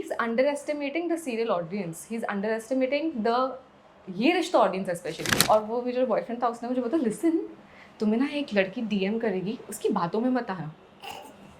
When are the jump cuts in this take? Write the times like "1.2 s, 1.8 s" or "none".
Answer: 5.3 s